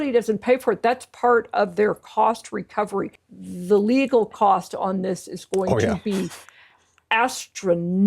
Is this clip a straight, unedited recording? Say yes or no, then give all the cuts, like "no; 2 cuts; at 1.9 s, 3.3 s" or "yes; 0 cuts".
no; 1 cut; at 3.2 s